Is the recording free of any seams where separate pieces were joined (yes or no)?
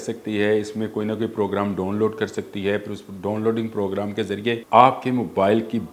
no